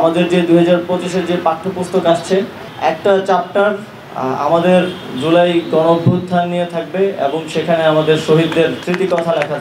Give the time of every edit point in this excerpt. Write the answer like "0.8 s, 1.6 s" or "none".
2.6 s, 8.8 s